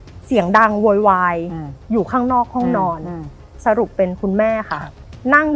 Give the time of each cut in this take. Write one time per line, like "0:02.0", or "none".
0:03.5